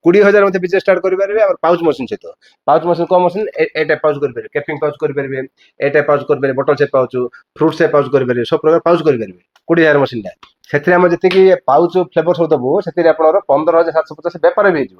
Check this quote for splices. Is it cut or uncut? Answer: uncut